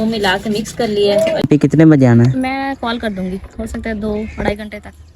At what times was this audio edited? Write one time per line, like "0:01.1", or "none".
0:01.4